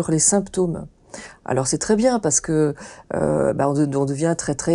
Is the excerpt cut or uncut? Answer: uncut